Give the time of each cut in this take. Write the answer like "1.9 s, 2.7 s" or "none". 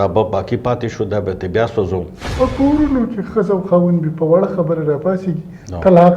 2.2 s